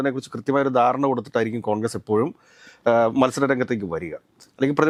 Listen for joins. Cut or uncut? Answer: uncut